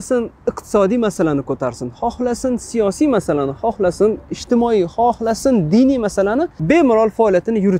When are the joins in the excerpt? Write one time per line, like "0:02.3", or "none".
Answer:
0:06.5